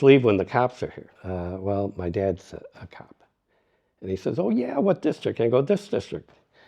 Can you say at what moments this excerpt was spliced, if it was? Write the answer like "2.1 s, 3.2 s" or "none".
1.1 s